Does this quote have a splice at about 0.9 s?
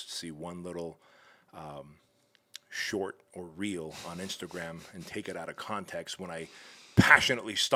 no; 0 cuts

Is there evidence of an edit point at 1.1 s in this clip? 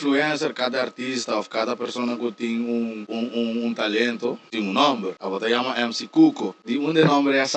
no; 4 cuts; at 3.0 s, 4.4 s, 5.2 s, 6.5 s

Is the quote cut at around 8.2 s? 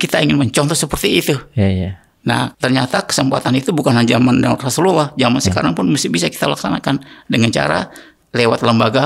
yes; 2 cuts; at 2.5 s, 8.2 s

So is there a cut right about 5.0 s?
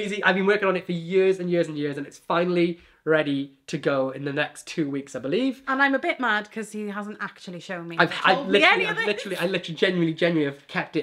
no; 0 cuts

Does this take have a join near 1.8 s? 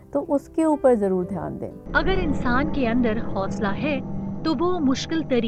yes; 1 cut; at 1.8 s

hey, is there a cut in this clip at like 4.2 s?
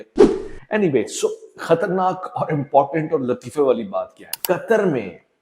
yes; 1 cut; at 4.2 s

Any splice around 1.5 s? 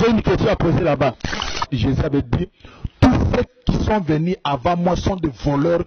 yes; 1 cut; at 1.5 s

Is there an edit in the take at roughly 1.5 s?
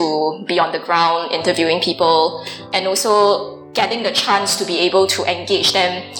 no; 1 cut; at 3.6 s

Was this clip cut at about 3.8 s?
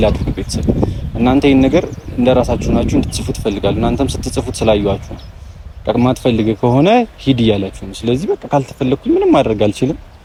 no; 0 cuts

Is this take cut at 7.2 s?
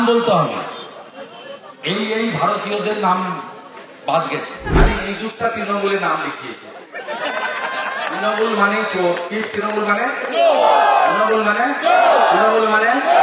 no; 1 cut; at 4.7 s

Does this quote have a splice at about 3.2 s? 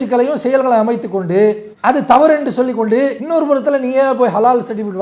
yes; 1 cut; at 3.2 s

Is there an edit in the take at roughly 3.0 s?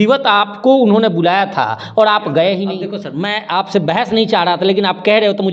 yes; 1 cut; at 3.0 s

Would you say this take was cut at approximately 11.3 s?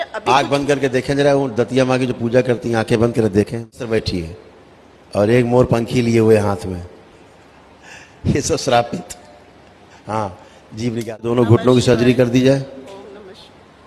yes; 2 cuts; at 3.9 s, 11.3 s

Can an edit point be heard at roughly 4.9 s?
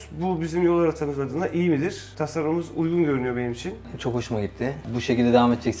yes; 1 cut; at 4.9 s

